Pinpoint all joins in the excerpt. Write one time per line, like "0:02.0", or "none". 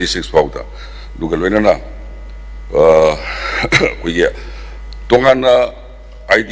none